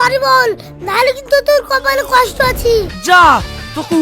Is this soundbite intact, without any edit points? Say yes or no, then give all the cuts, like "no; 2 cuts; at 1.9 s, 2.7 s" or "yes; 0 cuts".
no; 1 cut; at 2.9 s